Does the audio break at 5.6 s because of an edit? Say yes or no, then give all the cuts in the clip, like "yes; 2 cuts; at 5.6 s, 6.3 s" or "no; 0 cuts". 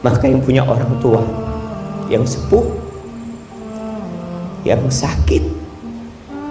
no; 0 cuts